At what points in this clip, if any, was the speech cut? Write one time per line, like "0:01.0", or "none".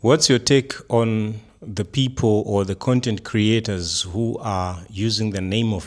none